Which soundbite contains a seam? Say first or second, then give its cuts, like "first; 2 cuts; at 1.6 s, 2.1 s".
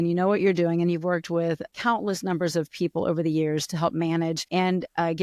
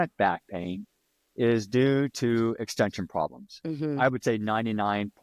first; 2 cuts; at 1.7 s, 4.4 s